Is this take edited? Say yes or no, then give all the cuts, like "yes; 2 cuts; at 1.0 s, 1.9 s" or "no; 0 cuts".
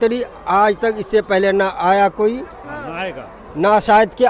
no; 0 cuts